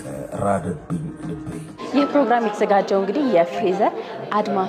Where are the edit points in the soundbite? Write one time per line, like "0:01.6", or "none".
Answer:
0:01.8